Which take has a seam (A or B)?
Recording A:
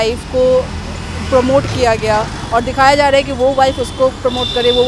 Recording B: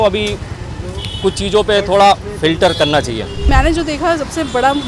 B